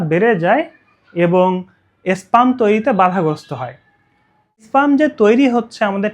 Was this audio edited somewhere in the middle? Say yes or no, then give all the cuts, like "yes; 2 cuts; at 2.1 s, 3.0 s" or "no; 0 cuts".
yes; 1 cut; at 4.6 s